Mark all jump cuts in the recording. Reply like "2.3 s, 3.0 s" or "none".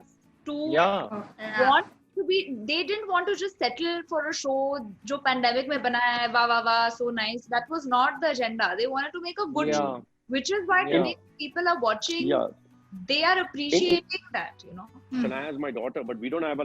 15.1 s